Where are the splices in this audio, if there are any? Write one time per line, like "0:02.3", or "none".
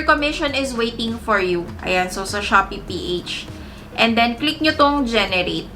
none